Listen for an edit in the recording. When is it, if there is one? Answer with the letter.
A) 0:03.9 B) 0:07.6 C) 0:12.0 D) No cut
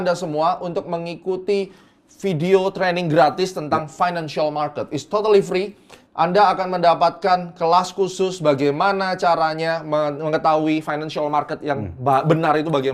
D